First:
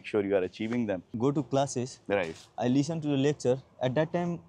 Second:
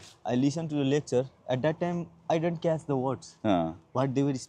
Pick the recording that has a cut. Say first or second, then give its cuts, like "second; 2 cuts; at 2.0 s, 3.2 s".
first; 1 cut; at 1.1 s